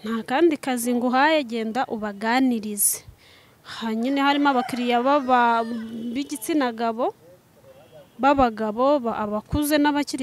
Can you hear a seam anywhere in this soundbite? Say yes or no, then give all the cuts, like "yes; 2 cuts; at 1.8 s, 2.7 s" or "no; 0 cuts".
no; 0 cuts